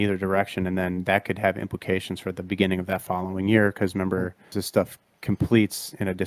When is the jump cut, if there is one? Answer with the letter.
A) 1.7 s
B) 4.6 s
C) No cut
B